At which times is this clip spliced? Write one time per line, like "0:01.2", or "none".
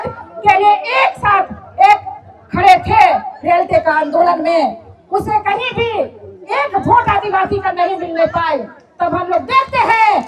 none